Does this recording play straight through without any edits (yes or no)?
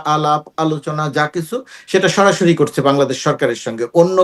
yes